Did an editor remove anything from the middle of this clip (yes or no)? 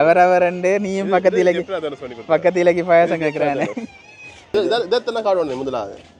yes